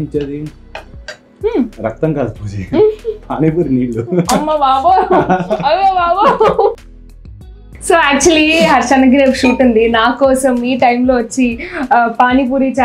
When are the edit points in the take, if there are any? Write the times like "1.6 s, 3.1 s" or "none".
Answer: 7.3 s